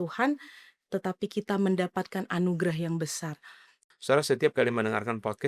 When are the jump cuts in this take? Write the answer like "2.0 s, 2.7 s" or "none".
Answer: 3.7 s